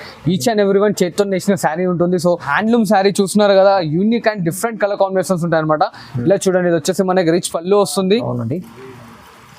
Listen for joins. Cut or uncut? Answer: cut